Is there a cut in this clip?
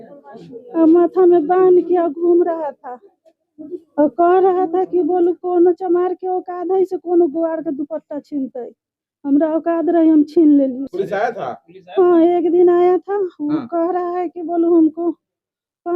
yes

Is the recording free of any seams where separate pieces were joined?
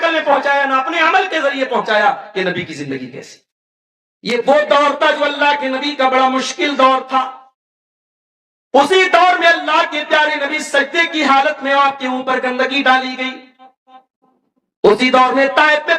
no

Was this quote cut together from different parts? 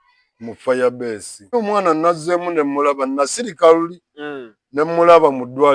yes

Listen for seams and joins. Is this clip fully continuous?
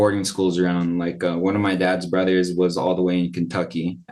yes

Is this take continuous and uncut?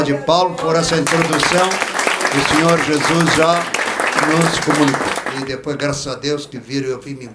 no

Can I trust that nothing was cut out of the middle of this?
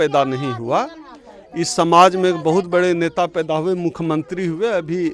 yes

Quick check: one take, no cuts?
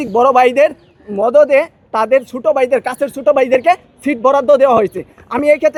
yes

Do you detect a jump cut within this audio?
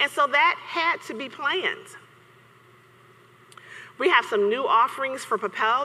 no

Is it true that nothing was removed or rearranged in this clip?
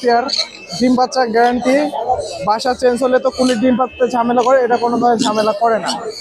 yes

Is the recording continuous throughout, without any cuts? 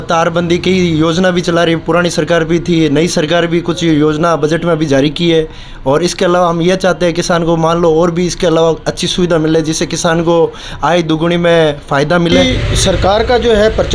no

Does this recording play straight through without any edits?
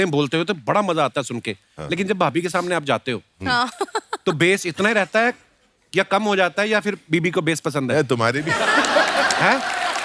yes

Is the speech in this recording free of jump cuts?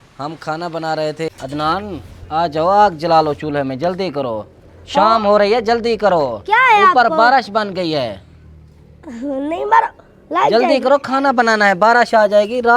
no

